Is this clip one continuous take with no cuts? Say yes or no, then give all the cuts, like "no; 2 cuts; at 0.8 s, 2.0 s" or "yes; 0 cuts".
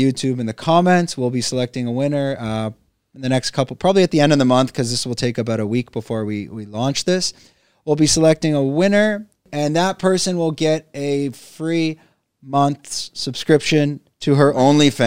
no; 1 cut; at 9.5 s